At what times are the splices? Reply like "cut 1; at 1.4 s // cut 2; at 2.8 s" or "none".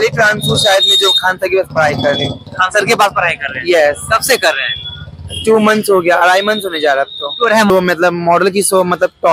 cut 1; at 7.7 s

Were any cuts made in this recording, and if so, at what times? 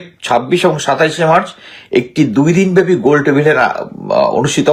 none

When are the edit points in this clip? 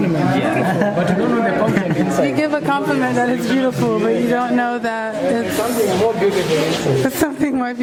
none

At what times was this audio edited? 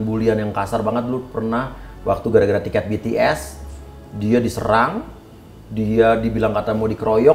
none

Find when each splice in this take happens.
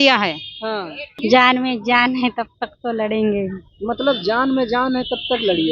cut 1; at 1.1 s

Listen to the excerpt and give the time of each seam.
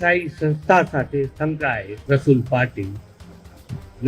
cut 1; at 1.9 s

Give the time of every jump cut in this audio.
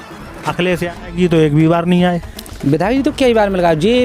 cut 1; at 0.9 s

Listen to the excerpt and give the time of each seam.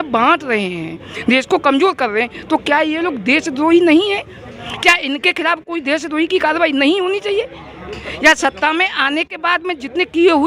none

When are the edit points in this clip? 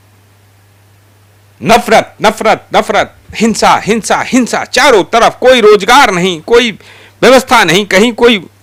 none

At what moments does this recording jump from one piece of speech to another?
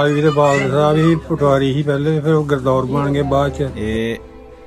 cut 1; at 3.7 s

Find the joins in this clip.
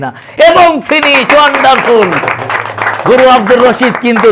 none

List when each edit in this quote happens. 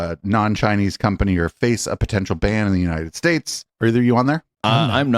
cut 1; at 3.6 s

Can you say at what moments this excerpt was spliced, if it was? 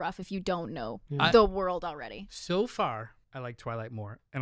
cut 1; at 1.0 s // cut 2; at 3.2 s

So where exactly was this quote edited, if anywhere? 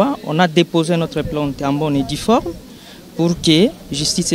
none

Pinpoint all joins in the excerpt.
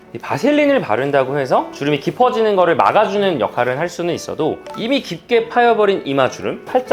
cut 1; at 1.7 s // cut 2; at 4.7 s

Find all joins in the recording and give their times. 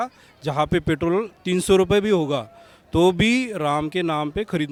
none

